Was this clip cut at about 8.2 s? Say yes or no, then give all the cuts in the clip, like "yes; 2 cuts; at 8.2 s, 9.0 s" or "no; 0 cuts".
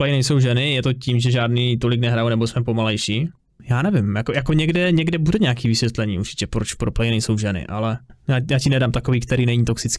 no; 0 cuts